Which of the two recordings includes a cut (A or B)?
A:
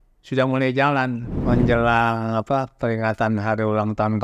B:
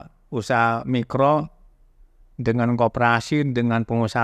A